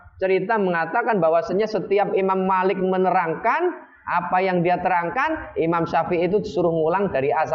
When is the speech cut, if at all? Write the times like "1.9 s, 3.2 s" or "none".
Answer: none